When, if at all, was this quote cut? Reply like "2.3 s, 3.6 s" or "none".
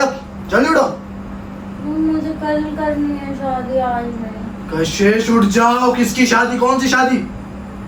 none